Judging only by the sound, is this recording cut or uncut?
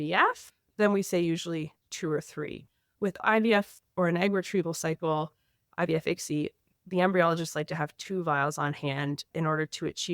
cut